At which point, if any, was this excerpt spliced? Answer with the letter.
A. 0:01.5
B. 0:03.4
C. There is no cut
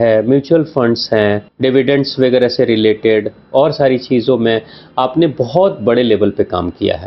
A